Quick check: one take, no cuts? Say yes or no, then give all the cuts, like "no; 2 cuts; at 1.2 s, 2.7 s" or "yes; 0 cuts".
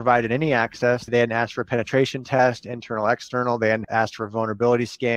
no; 2 cuts; at 1.1 s, 3.8 s